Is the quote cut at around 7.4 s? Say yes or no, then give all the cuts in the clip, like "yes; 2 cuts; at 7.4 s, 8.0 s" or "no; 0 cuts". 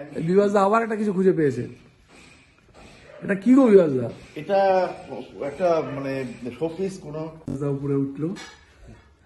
yes; 1 cut; at 7.4 s